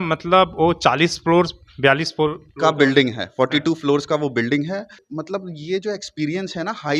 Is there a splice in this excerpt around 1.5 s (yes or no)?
no